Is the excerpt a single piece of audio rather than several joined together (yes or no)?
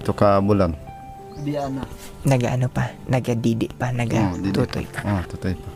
yes